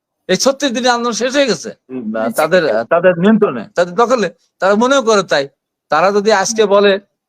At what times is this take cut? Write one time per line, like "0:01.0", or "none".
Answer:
0:02.0